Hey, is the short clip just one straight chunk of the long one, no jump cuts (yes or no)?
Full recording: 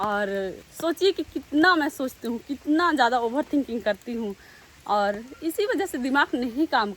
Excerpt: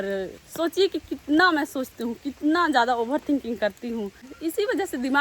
no